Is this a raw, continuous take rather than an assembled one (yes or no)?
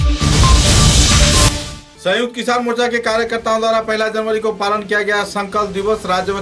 no